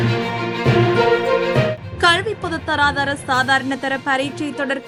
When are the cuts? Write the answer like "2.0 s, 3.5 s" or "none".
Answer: none